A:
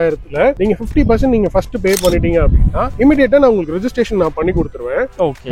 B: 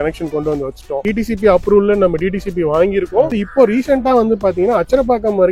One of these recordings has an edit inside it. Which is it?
B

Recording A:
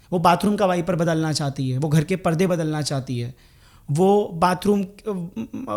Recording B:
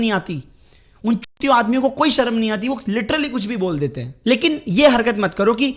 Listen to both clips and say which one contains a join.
B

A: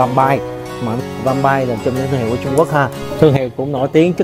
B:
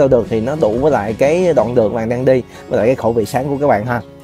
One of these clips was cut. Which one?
A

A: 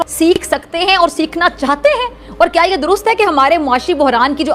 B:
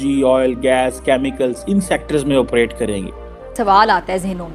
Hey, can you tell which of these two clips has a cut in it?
B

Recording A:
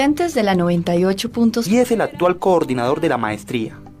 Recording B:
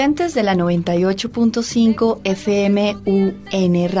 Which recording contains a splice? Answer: B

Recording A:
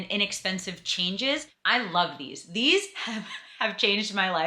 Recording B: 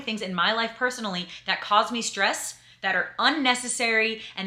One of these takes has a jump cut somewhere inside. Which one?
A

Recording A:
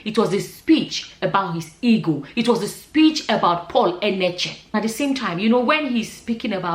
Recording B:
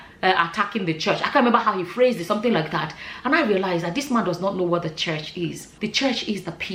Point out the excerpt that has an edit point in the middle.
A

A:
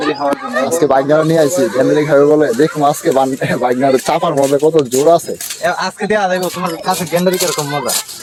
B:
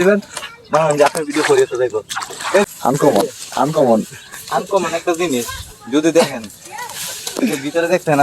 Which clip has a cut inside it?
B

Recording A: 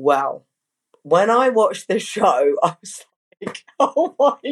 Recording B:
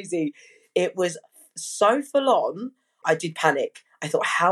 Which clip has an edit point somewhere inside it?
B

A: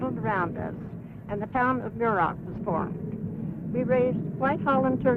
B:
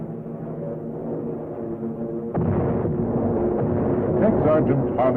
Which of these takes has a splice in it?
A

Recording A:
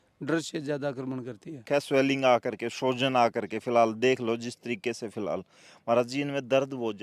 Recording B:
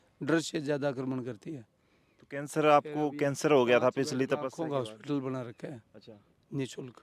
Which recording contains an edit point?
A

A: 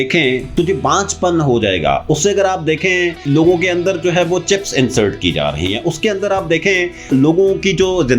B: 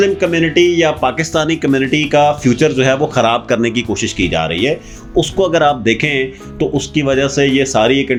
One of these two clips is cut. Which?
A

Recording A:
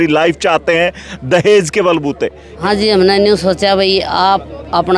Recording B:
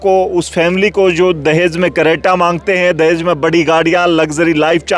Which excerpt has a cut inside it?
A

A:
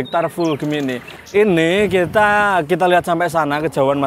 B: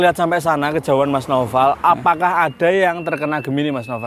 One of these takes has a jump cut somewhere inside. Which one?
A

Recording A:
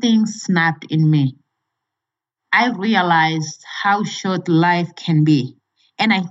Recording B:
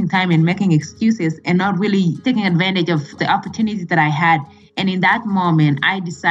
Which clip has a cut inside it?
B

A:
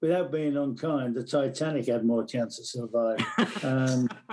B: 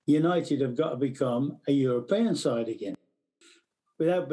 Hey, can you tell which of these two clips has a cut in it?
B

